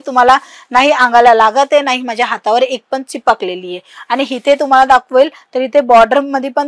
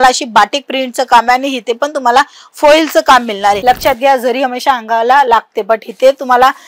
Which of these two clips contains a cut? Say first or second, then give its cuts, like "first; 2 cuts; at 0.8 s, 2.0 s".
second; 1 cut; at 3.6 s